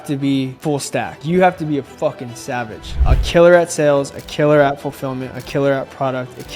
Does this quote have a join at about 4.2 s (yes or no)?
no